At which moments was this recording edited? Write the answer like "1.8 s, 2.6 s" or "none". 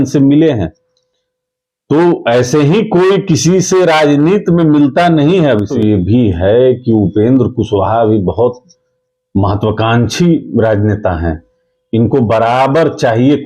5.7 s